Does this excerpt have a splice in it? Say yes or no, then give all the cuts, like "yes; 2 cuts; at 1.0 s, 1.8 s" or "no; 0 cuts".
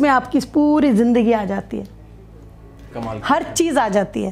no; 0 cuts